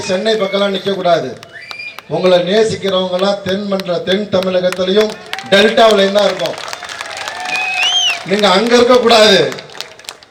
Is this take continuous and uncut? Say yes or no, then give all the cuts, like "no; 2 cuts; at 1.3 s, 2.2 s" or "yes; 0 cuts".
yes; 0 cuts